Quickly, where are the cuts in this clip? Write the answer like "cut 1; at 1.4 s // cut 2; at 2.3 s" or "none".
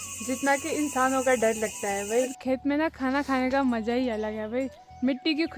cut 1; at 2.4 s